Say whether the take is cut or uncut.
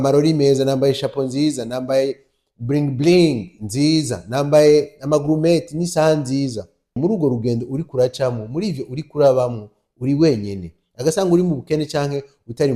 cut